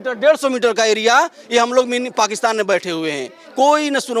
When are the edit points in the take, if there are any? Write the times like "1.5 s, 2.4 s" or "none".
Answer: none